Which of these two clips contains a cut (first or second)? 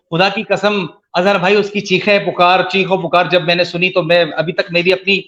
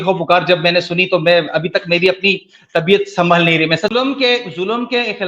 second